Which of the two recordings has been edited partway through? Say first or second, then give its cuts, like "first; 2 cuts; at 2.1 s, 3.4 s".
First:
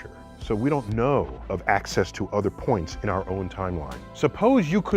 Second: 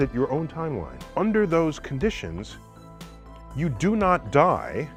first; 1 cut; at 2.4 s